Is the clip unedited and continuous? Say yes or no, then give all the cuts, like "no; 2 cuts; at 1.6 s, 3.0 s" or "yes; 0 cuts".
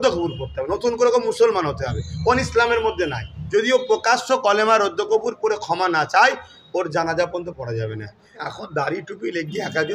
no; 2 cuts; at 3.3 s, 8.5 s